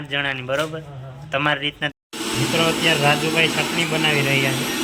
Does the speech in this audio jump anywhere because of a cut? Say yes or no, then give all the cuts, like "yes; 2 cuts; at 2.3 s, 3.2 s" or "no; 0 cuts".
yes; 1 cut; at 1.9 s